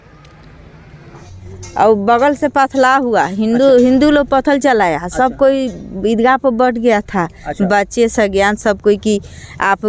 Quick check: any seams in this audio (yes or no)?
yes